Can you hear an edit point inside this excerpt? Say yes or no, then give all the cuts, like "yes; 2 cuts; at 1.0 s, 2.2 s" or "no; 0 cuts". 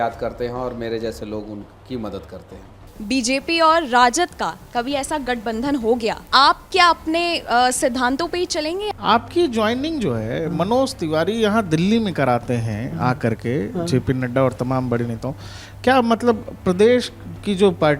yes; 3 cuts; at 2.9 s, 6.2 s, 8.8 s